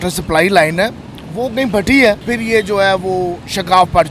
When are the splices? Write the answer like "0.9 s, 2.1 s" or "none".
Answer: 2.3 s